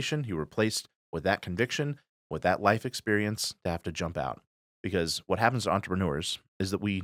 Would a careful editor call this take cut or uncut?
uncut